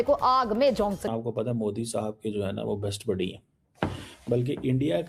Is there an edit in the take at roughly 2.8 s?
no; 1 cut; at 1.1 s

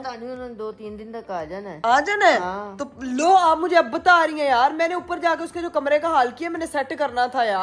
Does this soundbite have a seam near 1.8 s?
no; 0 cuts

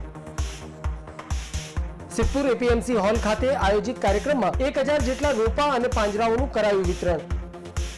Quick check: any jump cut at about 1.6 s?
yes; 1 cut; at 1.6 s

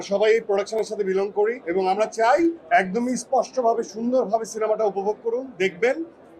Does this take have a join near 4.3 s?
no; 2 cuts; at 1.6 s, 2.6 s

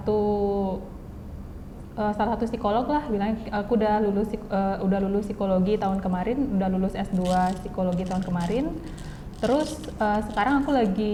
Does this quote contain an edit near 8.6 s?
no; 0 cuts

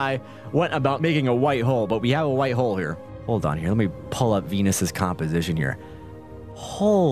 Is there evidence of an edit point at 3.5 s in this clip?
no; 1 cut; at 1.0 s

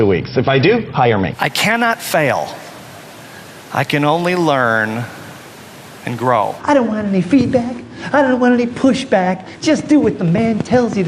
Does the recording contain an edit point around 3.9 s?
no; 2 cuts; at 1.4 s, 6.6 s

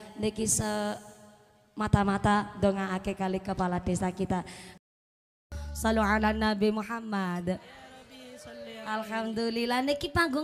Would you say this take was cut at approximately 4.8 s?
yes; 1 cut; at 4.8 s

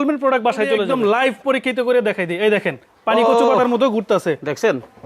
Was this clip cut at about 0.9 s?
yes; 1 cut; at 0.9 s

